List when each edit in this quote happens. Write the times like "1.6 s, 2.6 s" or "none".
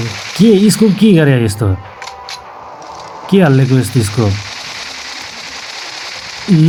none

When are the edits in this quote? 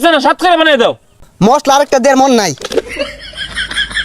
1.2 s, 3.0 s

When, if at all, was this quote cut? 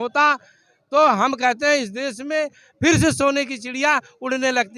none

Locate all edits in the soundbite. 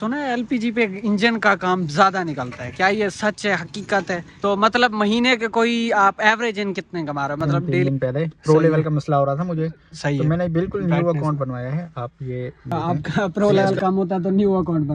4.3 s, 7.8 s, 12.6 s

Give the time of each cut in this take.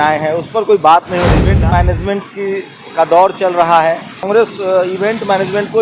1.4 s, 4.3 s

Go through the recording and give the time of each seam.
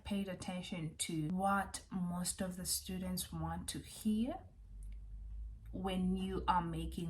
1.3 s

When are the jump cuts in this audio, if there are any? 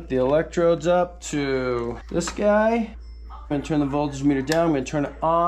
2.0 s, 3.5 s

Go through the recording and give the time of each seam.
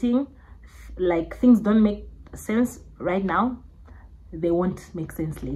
none

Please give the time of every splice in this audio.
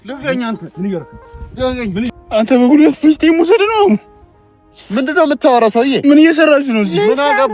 2.1 s

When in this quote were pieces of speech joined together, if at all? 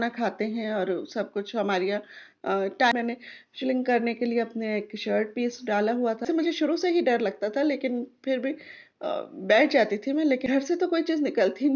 2.9 s, 6.2 s, 10.4 s

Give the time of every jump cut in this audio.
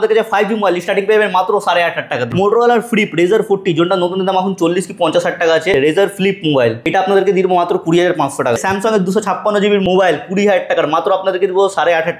2.2 s, 5.7 s, 6.8 s, 8.6 s, 9.8 s

